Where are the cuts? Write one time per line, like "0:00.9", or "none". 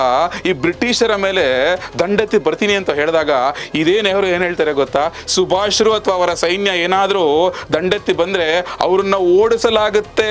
none